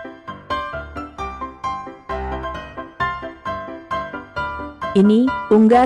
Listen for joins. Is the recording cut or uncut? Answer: cut